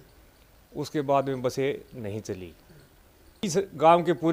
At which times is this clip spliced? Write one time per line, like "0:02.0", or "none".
0:03.4